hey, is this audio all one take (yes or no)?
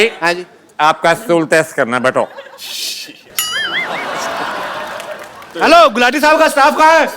no